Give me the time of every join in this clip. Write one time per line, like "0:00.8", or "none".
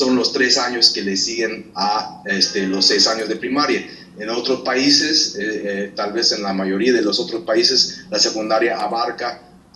none

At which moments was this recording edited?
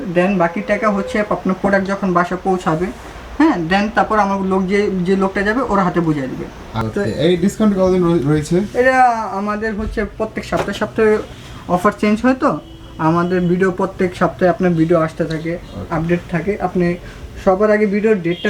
0:06.6

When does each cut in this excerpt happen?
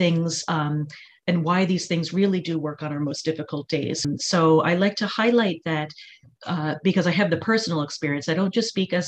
0:04.0

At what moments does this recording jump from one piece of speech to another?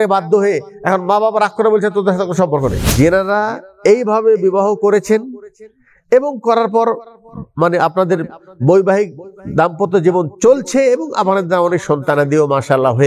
0:02.8

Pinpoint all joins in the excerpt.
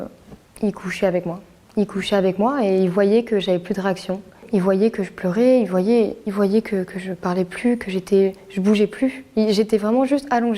none

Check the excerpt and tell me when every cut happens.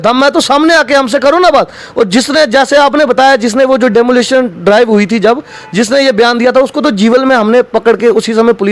none

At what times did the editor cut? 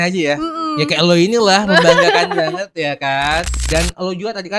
0:03.5

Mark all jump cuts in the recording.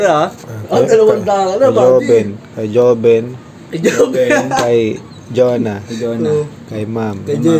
none

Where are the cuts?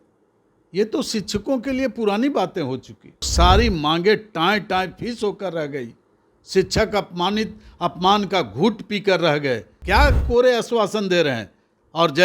0:03.3
0:09.7

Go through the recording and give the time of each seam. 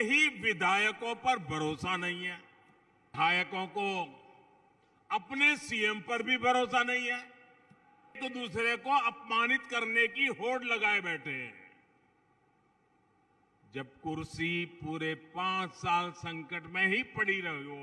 0:03.1
0:08.2

